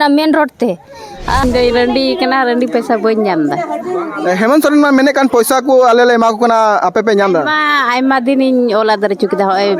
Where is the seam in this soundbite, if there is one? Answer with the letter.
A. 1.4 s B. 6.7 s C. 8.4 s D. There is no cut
A